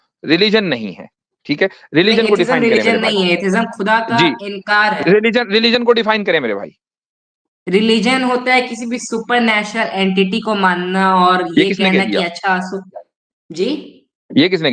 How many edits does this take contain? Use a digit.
0